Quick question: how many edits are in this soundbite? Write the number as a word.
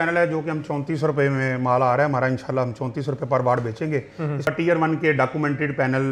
one